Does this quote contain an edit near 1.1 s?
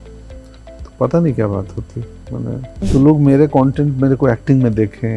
no; 1 cut; at 2.9 s

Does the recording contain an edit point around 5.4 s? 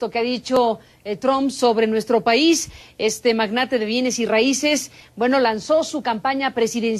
yes; 1 cut; at 5.4 s

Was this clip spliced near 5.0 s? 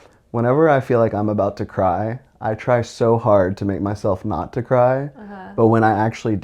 no; 0 cuts

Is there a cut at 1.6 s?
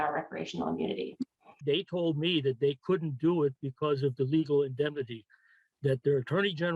yes; 1 cut; at 1.6 s

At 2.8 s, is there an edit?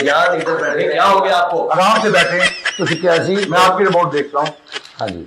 no; 0 cuts

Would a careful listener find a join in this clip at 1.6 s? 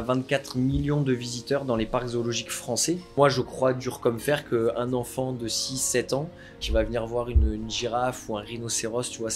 no; 2 cuts; at 3.1 s, 6.6 s

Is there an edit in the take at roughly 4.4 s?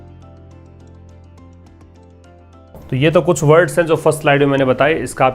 no; 1 cut; at 2.8 s

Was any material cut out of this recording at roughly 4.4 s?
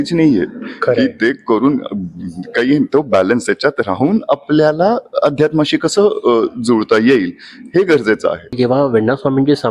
no; 1 cut; at 8.5 s

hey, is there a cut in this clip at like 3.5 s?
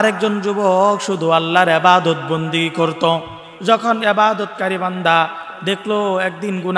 yes; 1 cut; at 3.5 s

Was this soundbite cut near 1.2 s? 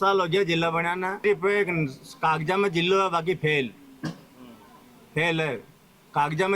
yes; 1 cut; at 1.2 s

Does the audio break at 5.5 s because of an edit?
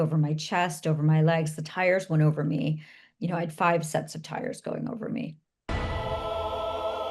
yes; 1 cut; at 5.5 s

